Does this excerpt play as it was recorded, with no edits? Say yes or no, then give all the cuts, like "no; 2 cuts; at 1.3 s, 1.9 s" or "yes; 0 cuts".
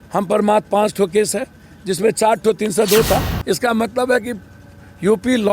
no; 1 cut; at 3.3 s